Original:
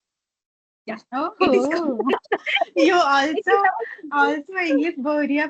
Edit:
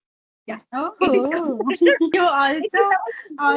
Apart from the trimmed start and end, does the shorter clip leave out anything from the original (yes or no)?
yes